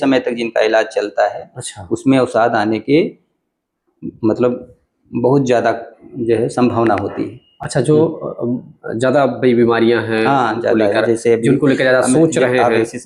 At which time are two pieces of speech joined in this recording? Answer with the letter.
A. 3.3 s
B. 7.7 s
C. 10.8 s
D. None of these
D